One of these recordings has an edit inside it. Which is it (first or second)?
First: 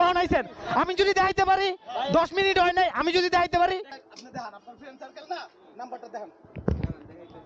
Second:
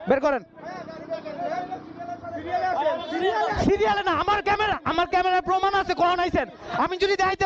first